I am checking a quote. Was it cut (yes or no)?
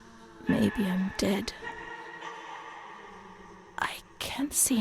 yes